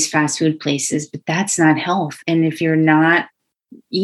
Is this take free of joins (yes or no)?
no